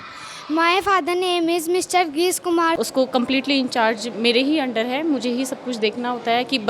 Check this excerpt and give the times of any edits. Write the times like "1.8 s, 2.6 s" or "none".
2.8 s